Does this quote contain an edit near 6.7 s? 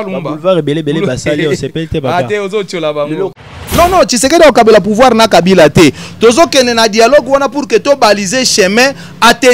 no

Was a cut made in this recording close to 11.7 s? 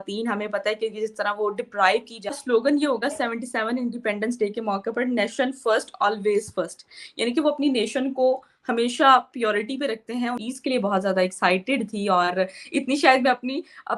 no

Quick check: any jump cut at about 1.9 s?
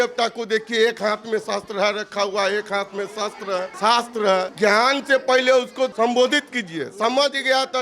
no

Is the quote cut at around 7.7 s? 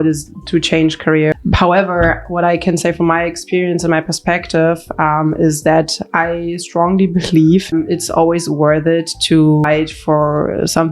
yes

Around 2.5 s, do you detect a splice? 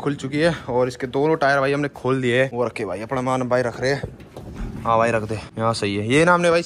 yes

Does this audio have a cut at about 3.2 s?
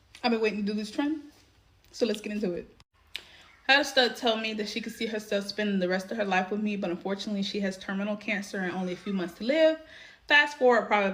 no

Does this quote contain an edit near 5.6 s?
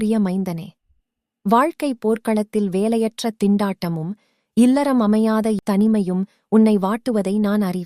yes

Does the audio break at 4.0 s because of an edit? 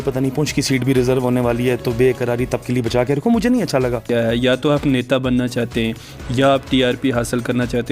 yes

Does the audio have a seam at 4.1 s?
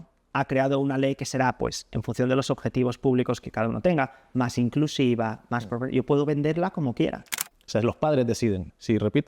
no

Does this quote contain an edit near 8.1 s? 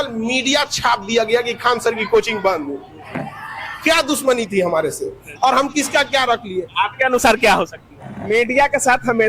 yes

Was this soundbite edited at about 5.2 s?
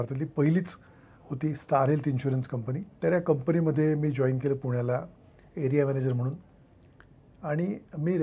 no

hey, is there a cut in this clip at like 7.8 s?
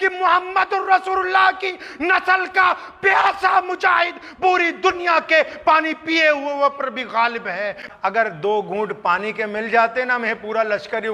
yes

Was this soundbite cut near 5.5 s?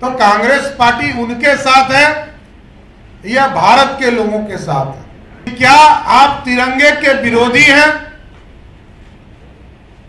yes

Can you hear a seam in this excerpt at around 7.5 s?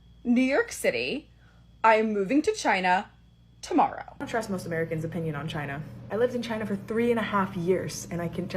no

